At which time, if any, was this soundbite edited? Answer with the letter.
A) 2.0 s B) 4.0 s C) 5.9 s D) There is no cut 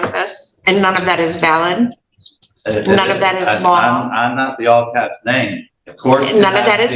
D